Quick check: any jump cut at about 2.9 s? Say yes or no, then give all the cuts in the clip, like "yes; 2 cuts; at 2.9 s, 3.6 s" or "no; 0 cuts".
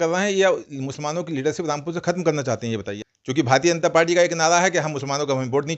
yes; 1 cut; at 2.9 s